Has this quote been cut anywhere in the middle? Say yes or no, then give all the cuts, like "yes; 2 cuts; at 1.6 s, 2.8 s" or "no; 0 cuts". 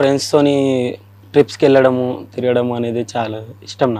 no; 0 cuts